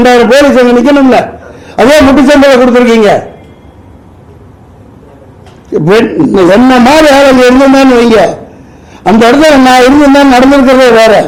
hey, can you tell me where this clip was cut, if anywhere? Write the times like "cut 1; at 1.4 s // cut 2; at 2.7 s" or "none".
none